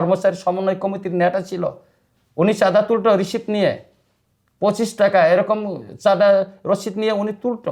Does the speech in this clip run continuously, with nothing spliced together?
yes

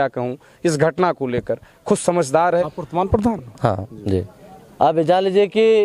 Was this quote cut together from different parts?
yes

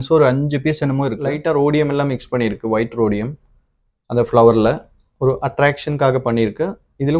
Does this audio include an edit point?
yes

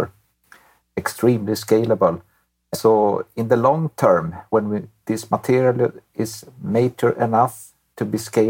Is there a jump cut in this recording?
yes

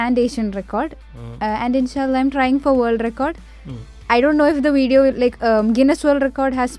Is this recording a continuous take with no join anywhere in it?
yes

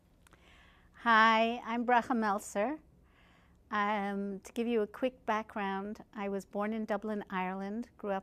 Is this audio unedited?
yes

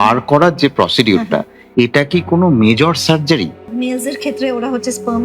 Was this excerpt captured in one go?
no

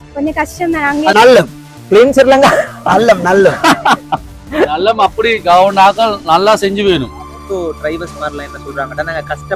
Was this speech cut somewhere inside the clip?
yes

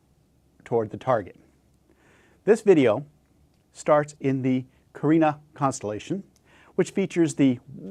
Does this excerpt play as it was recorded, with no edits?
yes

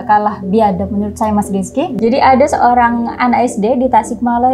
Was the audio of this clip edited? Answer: yes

